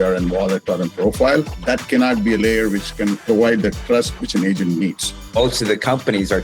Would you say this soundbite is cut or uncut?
cut